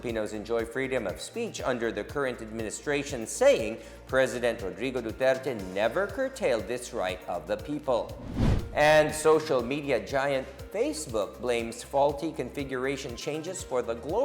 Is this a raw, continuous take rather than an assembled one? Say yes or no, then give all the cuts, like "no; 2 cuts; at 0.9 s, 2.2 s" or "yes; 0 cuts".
yes; 0 cuts